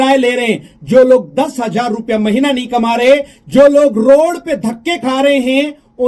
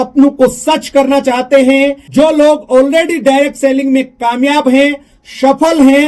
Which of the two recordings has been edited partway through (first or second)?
second